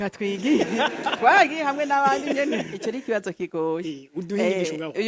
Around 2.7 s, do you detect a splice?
yes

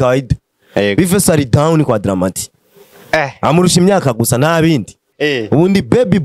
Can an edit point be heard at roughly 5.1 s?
yes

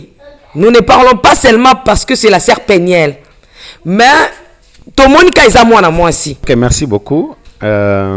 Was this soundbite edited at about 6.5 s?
yes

